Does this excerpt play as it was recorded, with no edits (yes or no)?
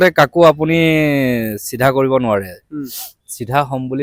yes